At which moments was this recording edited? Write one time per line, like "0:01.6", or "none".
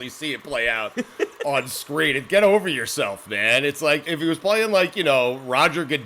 0:04.1